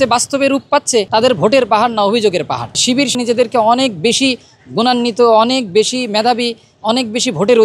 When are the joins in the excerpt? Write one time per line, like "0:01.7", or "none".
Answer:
0:01.1
0:03.1